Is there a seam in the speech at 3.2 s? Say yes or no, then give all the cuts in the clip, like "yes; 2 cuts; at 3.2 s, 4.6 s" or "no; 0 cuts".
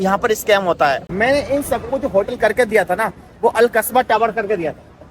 no; 1 cut; at 1.0 s